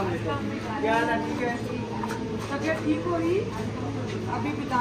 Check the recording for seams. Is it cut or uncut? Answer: uncut